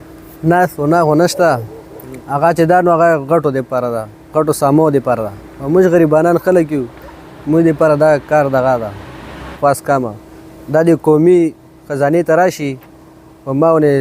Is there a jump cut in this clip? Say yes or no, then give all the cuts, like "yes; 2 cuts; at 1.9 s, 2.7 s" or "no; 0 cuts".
yes; 1 cut; at 9.4 s